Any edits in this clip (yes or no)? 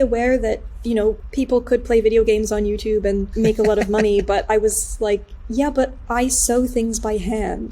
yes